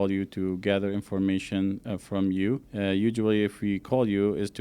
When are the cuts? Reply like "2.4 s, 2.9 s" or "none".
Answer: 2.7 s